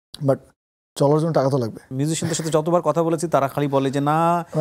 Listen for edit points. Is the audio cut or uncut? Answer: cut